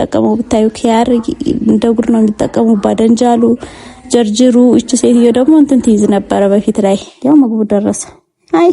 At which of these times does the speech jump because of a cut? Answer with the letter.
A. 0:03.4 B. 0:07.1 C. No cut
B